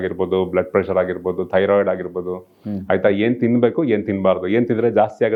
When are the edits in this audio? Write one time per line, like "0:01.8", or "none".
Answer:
none